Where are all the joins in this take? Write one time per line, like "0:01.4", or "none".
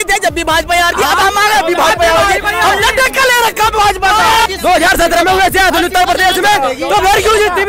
0:04.4